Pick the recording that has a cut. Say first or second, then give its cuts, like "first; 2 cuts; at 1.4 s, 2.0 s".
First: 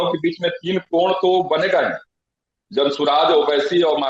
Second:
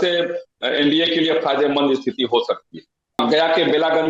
second; 1 cut; at 3.2 s